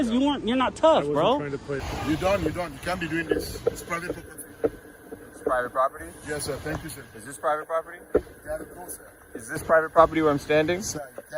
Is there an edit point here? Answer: yes; 1 cut; at 1.9 s

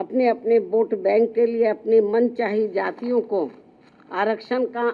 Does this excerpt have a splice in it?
no; 0 cuts

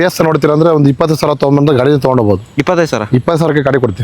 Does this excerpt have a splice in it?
no; 0 cuts

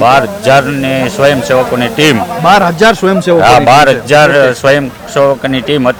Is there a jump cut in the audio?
no; 0 cuts

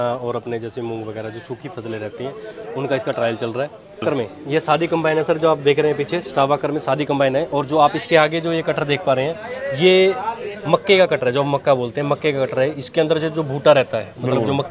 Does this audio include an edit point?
yes; 1 cut; at 4.0 s

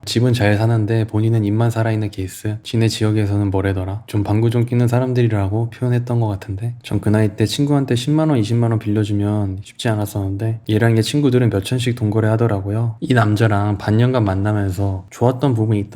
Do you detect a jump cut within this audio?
yes; 3 cuts; at 2.6 s, 6.8 s, 12.9 s

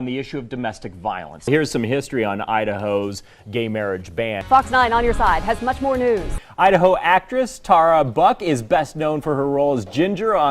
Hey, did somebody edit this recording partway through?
yes; 3 cuts; at 1.3 s, 4.4 s, 6.3 s

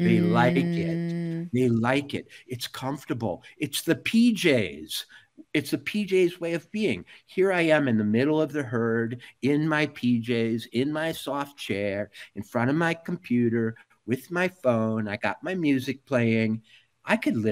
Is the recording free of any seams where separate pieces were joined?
yes; 0 cuts

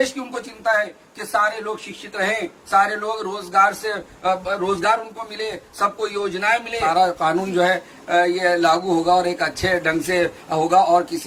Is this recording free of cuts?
yes; 0 cuts

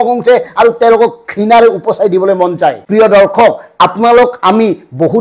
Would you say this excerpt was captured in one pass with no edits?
no; 1 cut; at 2.8 s

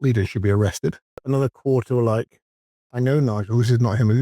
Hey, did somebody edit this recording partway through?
yes; 1 cut; at 1.2 s

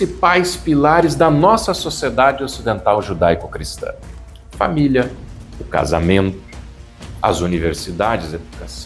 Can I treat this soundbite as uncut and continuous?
yes; 0 cuts

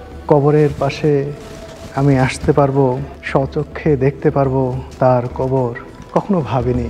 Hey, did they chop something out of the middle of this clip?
yes; 3 cuts; at 3.1 s, 4.8 s, 5.9 s

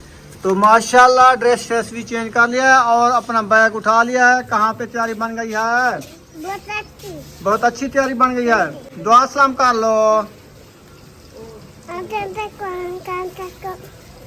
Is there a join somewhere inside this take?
no; 0 cuts

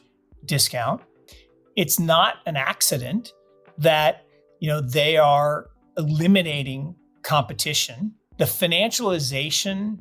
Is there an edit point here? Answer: yes; 2 cuts; at 1.2 s, 8.2 s

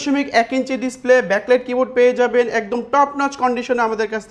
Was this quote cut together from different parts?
no; 0 cuts

